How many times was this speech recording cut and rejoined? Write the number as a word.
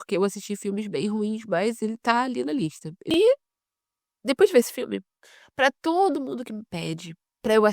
one